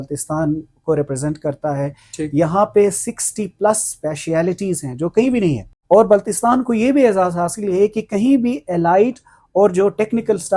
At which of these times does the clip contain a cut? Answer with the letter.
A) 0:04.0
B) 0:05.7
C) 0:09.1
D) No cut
B